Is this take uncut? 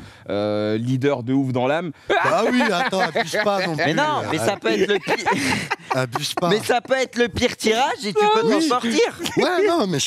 no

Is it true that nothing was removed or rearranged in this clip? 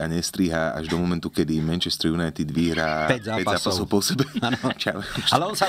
yes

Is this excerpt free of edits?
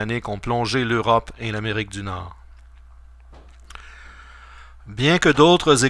no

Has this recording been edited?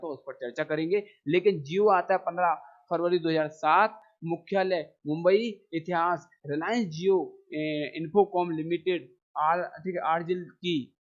no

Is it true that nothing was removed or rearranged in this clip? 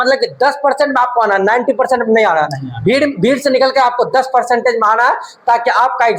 yes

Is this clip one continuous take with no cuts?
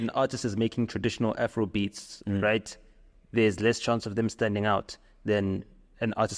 yes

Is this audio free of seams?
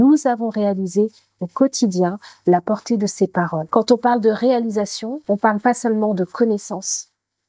no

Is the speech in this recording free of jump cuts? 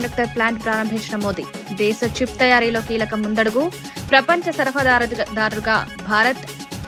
yes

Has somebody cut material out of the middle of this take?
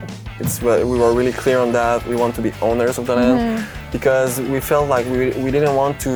no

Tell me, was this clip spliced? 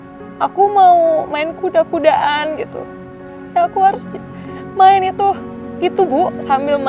no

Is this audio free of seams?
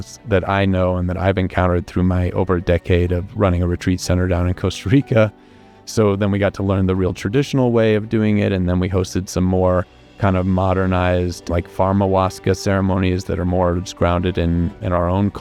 yes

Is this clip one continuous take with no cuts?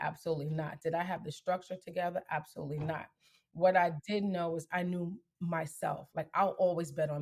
yes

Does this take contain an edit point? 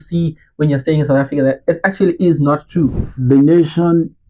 yes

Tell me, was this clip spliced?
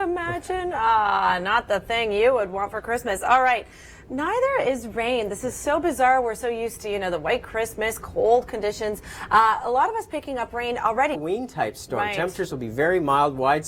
yes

